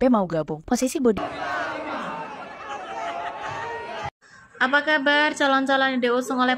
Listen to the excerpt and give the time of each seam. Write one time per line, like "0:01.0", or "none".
0:01.2

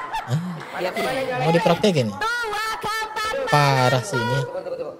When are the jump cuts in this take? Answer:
0:00.9

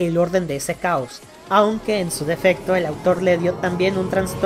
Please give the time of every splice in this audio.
none

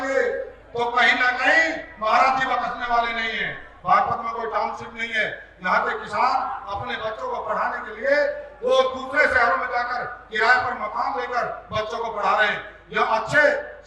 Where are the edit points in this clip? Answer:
0:03.6

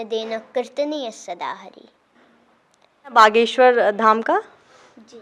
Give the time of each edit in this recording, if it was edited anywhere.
0:03.1

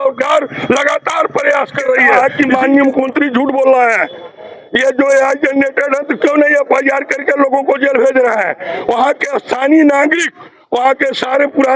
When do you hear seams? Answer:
0:02.0

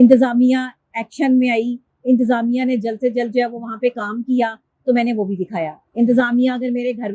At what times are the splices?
none

